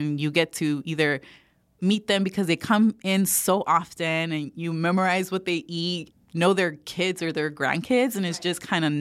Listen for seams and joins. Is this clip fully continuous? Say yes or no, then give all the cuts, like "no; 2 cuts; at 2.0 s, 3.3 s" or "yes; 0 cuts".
no; 1 cut; at 6.0 s